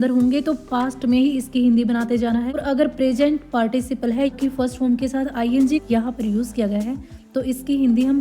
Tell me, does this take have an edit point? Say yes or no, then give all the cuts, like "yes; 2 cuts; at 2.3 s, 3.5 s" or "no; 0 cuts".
yes; 3 cuts; at 2.6 s, 4.3 s, 5.8 s